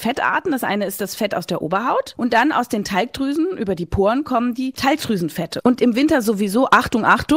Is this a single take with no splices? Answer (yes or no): no